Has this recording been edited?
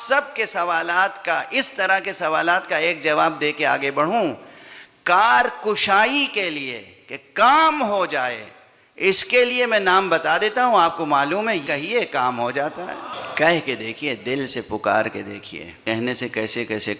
yes; 3 cuts; at 11.6 s, 13.1 s, 15.8 s

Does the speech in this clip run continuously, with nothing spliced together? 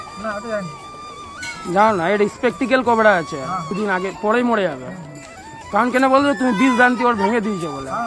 no; 1 cut; at 3.6 s

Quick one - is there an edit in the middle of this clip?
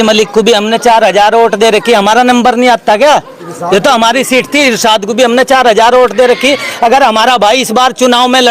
no; 0 cuts

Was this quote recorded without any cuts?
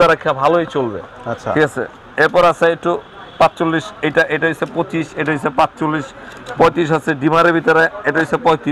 yes; 0 cuts

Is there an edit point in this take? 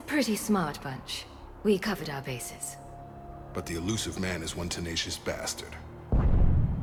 no; 0 cuts

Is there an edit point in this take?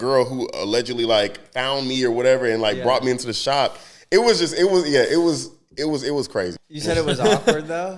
yes; 1 cut; at 6.6 s

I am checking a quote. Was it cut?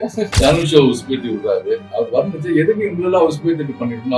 yes; 1 cut; at 1.9 s

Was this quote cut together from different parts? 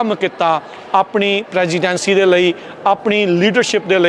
no; 0 cuts

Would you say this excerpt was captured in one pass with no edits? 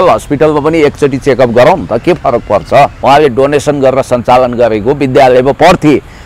no; 1 cut; at 3.0 s

